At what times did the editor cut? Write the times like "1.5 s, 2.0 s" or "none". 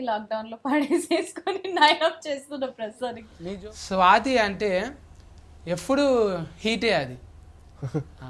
3.3 s